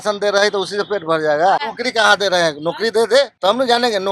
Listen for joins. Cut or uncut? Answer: cut